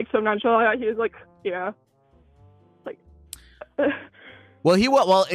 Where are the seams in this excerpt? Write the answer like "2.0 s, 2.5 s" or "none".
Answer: none